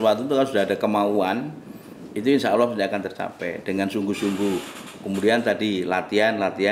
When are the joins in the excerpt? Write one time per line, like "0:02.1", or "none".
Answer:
none